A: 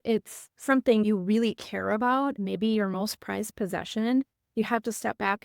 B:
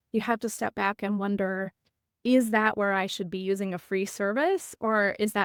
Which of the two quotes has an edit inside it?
A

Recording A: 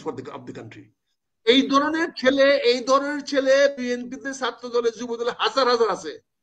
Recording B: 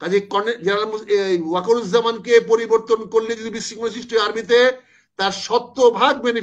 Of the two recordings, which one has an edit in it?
A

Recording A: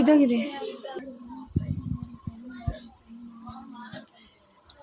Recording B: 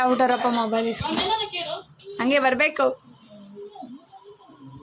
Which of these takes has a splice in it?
A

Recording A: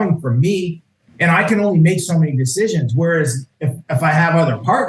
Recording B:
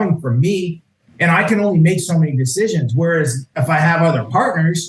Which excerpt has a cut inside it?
B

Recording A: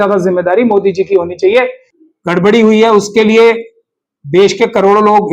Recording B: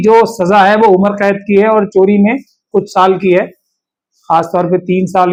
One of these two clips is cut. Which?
A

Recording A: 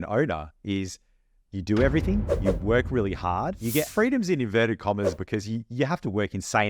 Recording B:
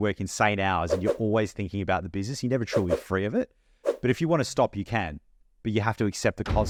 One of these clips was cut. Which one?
A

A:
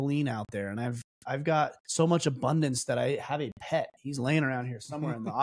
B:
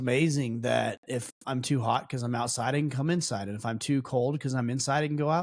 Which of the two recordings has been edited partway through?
A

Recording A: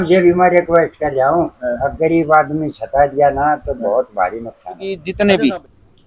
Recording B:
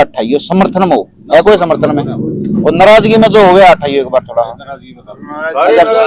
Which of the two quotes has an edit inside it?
A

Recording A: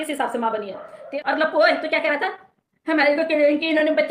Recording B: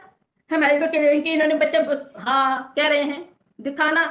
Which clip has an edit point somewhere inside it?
A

